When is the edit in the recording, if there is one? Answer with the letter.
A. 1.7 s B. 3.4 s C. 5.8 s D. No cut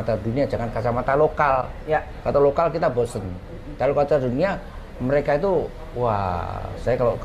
D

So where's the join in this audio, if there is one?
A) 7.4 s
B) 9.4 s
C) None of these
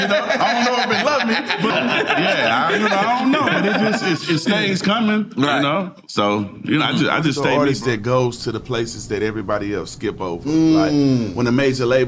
A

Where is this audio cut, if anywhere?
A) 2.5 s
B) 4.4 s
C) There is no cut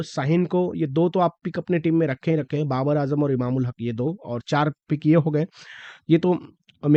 C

